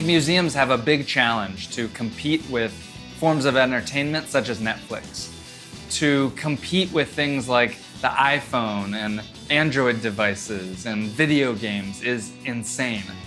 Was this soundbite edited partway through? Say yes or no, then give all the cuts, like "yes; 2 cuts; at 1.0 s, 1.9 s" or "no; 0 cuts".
no; 0 cuts